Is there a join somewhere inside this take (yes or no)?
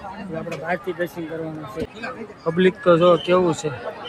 no